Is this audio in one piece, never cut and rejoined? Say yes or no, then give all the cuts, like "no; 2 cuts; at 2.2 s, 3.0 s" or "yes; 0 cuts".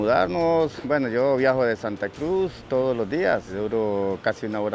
no; 1 cut; at 3.5 s